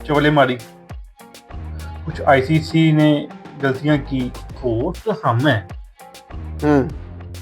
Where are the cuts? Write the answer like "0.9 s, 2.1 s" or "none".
4.6 s